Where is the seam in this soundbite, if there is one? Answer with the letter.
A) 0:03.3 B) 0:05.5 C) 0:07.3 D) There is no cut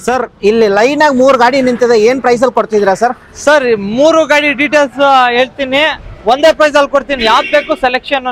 D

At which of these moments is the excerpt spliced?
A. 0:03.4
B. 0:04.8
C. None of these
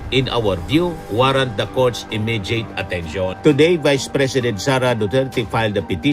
A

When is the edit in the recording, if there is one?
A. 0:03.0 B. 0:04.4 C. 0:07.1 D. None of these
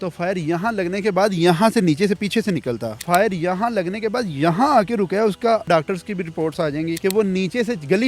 D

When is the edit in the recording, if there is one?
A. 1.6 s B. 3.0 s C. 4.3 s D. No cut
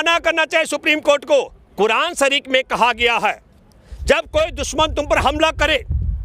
A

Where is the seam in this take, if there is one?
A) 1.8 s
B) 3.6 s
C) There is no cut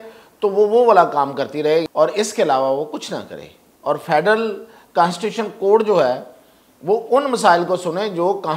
A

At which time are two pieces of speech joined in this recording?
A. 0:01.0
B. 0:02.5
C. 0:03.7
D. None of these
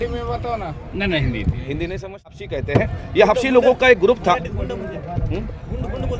B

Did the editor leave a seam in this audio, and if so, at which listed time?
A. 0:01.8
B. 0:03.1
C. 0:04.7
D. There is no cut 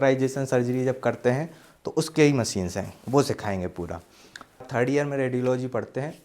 C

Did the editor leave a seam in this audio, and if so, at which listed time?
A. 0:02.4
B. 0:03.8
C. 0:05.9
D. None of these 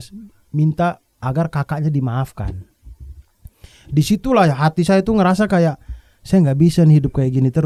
D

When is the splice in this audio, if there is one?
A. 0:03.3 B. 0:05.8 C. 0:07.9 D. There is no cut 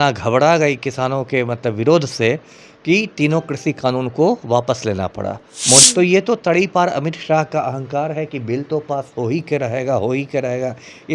B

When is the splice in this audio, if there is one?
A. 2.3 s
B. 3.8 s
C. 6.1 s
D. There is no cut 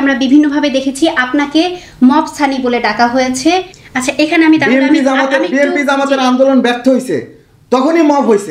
B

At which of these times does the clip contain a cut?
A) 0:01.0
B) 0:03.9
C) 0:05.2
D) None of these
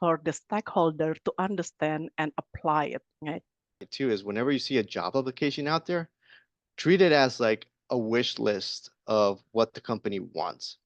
B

